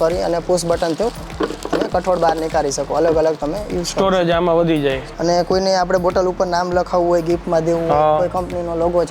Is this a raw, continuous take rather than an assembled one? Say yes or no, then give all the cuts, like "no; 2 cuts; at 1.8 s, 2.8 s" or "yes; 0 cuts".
no; 1 cut; at 5.1 s